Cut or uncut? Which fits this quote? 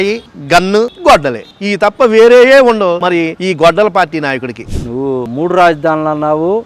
cut